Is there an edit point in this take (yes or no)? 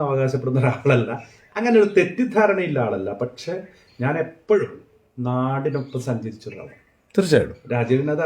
no